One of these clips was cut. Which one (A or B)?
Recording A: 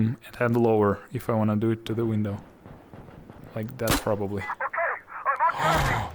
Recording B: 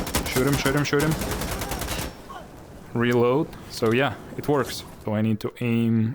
B